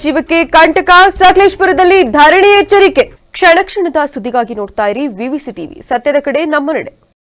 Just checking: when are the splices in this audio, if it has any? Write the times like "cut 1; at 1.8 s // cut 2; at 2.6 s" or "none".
none